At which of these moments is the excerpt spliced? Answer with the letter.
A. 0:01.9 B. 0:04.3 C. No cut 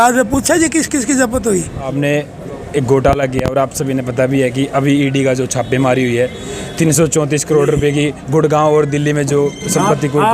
A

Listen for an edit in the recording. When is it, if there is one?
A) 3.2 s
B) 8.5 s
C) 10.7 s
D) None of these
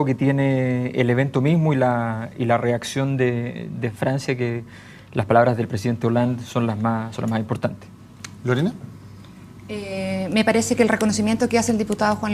D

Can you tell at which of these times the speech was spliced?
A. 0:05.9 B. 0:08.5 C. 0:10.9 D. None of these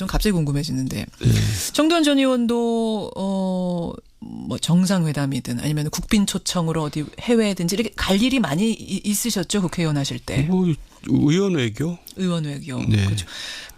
D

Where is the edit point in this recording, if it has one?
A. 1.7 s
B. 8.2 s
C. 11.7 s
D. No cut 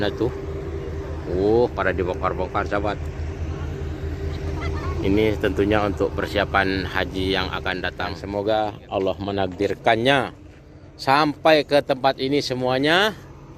B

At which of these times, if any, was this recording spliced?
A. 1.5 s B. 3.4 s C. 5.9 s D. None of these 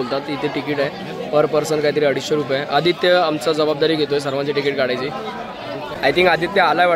C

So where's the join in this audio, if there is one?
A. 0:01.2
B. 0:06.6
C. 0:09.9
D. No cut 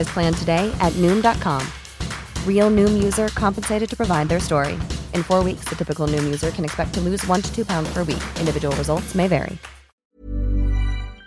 C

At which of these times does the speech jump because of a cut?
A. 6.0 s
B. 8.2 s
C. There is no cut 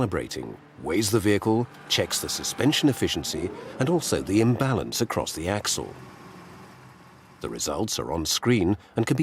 C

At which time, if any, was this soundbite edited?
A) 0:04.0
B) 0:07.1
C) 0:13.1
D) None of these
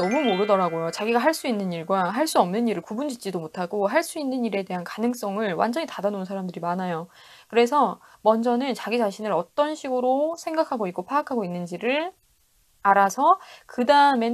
D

